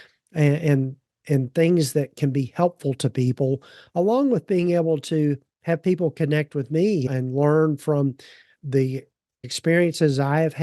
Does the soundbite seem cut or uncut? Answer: cut